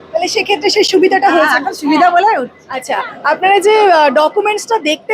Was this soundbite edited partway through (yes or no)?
yes